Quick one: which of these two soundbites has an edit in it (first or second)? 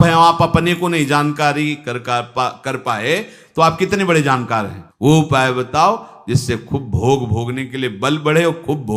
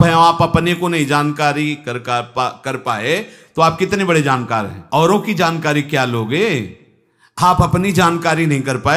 first